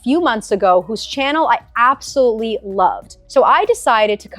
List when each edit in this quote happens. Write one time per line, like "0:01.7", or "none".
0:03.1